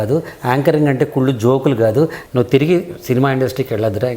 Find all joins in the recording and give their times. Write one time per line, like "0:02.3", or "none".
0:02.2